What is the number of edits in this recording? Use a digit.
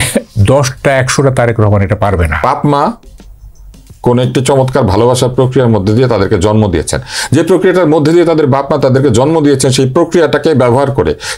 1